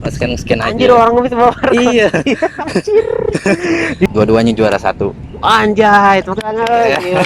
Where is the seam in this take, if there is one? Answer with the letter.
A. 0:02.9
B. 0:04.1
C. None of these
B